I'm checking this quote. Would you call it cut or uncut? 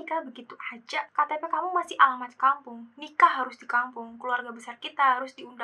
uncut